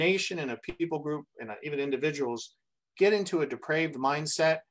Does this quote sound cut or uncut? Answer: uncut